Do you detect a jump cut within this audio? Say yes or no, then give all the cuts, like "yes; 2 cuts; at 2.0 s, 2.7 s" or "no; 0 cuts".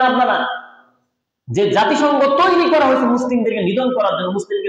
no; 0 cuts